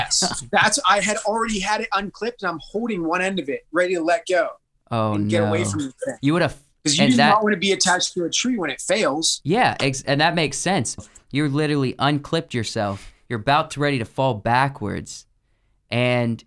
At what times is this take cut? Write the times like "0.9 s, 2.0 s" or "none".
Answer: 11.0 s